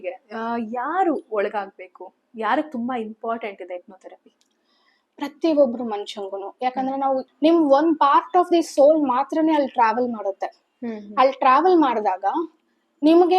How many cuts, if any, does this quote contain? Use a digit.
1